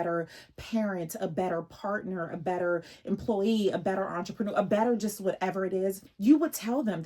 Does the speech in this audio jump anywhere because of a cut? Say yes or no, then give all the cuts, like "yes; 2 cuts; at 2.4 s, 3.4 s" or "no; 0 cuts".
yes; 1 cut; at 6.1 s